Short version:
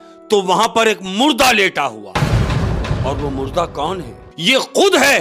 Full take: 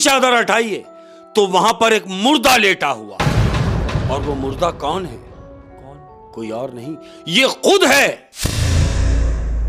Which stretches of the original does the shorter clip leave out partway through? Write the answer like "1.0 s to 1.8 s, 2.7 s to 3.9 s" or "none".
5.3 s to 7.1 s